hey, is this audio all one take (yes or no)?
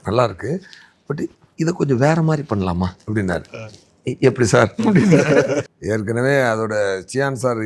no